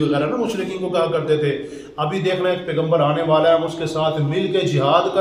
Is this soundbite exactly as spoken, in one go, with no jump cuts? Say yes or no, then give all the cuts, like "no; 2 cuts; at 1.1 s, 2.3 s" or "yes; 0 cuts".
yes; 0 cuts